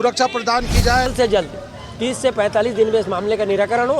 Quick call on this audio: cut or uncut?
cut